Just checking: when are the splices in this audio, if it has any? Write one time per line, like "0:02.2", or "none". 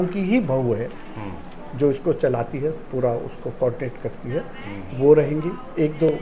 none